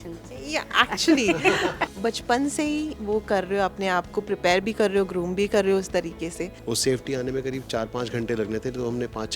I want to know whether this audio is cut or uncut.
cut